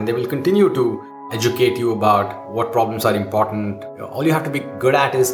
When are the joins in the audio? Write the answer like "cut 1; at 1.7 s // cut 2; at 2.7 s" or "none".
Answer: cut 1; at 1.3 s // cut 2; at 4.3 s